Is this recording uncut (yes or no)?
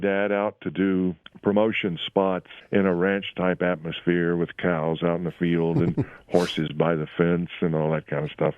no